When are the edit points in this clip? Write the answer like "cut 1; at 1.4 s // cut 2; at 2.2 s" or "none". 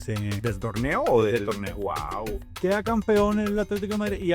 cut 1; at 2.4 s